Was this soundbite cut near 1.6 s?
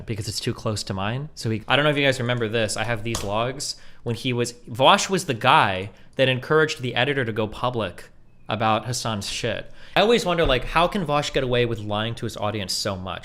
yes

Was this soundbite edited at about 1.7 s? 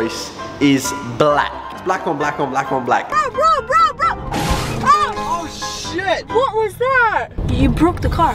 yes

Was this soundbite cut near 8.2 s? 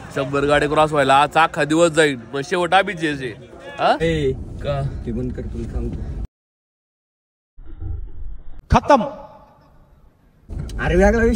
no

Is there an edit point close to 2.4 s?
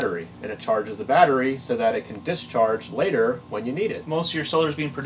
no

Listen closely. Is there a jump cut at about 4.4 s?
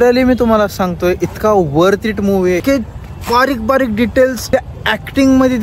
yes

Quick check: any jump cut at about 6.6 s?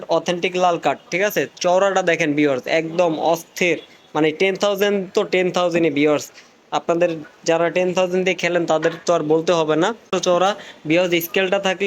no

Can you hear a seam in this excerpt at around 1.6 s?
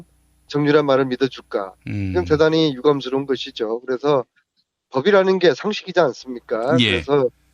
yes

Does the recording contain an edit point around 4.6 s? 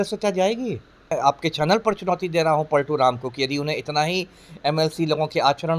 no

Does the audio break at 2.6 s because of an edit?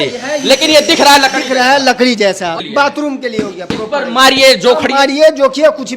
yes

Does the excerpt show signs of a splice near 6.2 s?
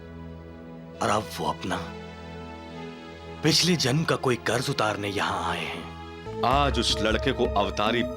yes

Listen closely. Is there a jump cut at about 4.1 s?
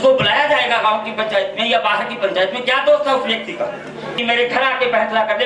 yes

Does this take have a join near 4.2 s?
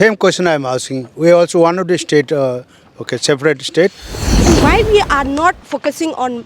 yes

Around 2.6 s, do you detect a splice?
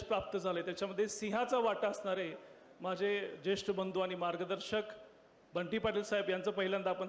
no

